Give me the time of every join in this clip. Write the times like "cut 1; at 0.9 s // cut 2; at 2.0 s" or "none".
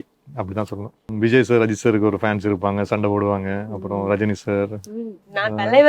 cut 1; at 1.1 s